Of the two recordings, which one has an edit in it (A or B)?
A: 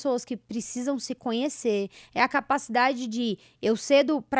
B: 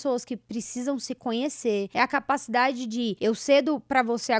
B